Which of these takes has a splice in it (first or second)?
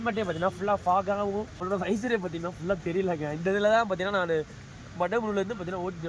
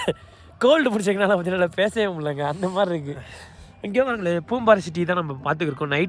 first